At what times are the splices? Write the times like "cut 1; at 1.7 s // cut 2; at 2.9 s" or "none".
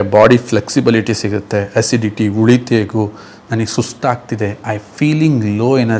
none